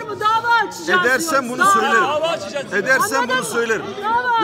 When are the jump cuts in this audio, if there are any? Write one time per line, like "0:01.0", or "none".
none